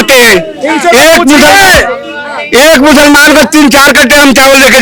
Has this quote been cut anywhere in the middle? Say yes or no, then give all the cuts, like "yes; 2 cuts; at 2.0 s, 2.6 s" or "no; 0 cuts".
no; 0 cuts